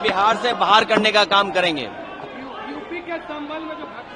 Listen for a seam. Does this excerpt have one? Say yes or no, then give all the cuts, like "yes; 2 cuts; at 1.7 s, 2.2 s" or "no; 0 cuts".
no; 0 cuts